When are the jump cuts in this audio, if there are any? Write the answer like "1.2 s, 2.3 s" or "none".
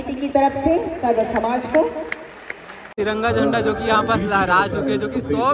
2.9 s